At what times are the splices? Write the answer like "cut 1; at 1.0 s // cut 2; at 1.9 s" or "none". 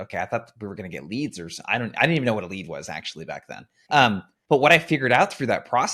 none